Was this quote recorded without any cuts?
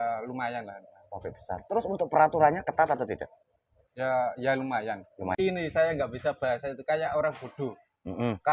no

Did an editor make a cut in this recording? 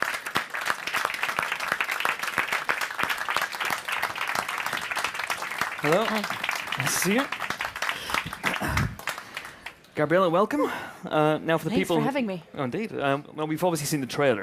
no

